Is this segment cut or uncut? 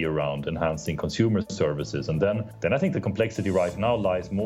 cut